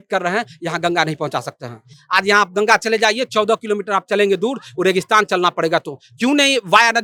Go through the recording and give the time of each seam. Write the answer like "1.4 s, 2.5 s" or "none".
none

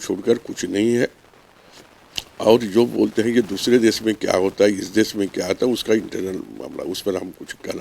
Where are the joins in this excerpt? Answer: none

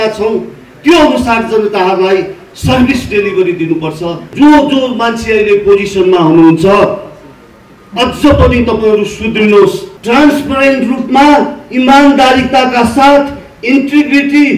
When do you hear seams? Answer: 4.3 s, 9.9 s

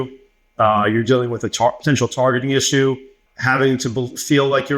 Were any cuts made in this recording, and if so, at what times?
3.2 s

